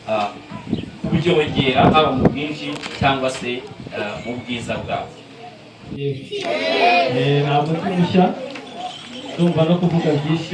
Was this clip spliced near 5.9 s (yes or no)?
yes